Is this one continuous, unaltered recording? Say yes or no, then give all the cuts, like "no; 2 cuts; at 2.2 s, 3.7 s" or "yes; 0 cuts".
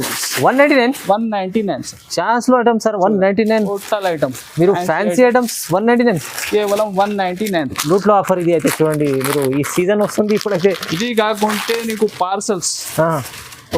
yes; 0 cuts